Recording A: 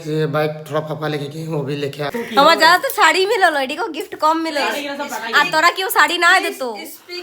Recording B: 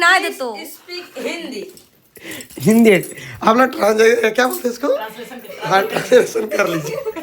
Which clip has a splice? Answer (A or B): A